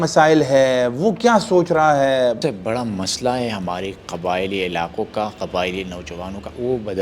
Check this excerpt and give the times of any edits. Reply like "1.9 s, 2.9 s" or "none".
2.4 s